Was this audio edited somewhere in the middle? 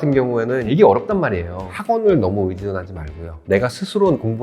yes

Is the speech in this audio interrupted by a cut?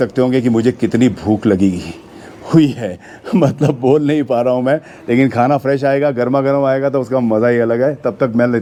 no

